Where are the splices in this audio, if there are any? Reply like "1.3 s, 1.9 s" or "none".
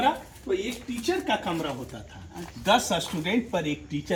none